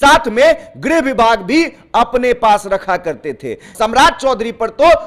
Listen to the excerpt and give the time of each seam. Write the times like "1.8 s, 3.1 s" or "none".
3.7 s